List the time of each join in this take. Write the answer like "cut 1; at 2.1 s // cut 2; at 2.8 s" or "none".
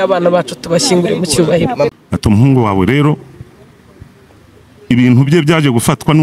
cut 1; at 1.9 s